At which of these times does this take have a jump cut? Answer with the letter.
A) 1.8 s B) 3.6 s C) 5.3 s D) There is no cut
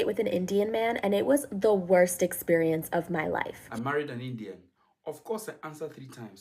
B